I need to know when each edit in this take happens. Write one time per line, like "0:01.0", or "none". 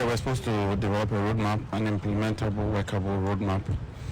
0:01.6